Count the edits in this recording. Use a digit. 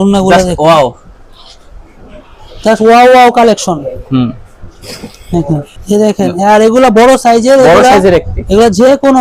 1